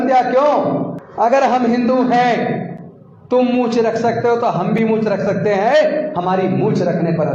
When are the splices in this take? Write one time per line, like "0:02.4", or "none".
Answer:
0:01.0